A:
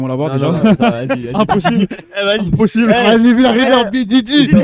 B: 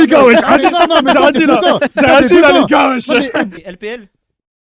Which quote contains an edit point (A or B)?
B